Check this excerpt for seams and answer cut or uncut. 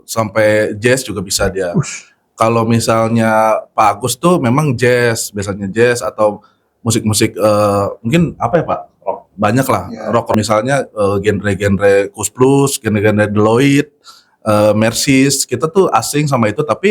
cut